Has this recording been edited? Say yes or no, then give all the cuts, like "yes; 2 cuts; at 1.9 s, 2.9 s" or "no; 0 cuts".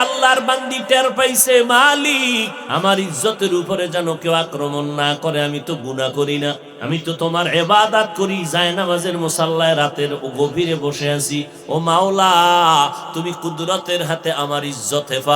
yes; 2 cuts; at 2.6 s, 6.7 s